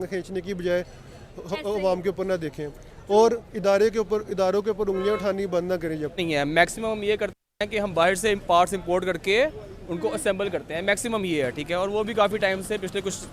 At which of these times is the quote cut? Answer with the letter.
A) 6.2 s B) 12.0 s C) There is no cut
A